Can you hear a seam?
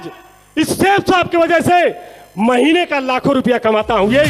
no; 0 cuts

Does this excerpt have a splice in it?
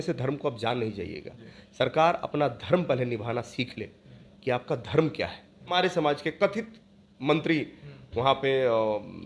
yes; 1 cut; at 5.7 s

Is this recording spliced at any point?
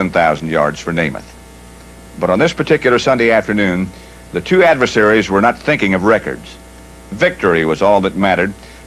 yes; 1 cut; at 4.4 s

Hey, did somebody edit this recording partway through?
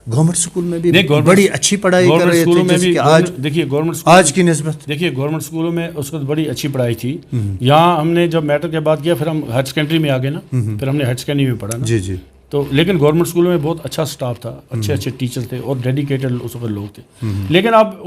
no; 0 cuts

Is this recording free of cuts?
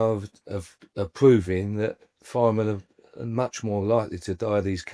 yes; 0 cuts

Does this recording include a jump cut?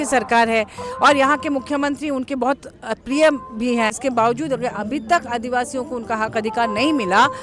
yes; 1 cut; at 4.0 s

